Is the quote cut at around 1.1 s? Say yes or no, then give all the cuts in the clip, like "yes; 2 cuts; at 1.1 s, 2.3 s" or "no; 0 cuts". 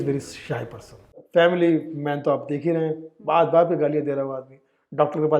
yes; 1 cut; at 1.1 s